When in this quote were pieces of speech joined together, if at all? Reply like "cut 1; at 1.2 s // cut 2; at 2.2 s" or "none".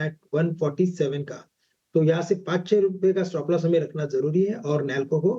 cut 1; at 2.2 s